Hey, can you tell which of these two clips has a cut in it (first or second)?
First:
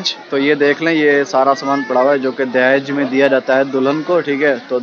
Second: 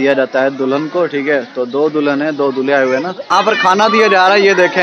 second